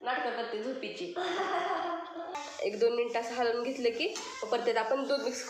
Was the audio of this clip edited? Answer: yes; 1 cut; at 2.2 s

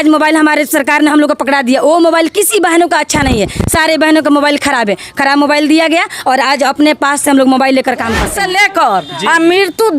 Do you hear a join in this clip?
yes; 1 cut; at 8.3 s

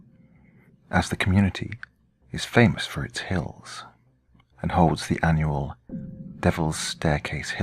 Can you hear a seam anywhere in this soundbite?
no; 0 cuts

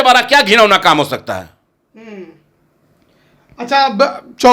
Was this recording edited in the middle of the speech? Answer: no; 0 cuts

